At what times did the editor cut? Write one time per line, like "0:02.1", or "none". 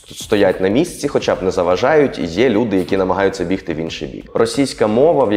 0:04.2